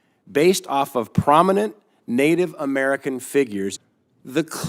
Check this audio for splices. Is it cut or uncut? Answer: cut